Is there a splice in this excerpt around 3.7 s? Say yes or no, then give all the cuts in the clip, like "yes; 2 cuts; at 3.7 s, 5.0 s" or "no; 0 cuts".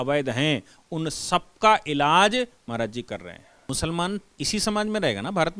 yes; 1 cut; at 3.7 s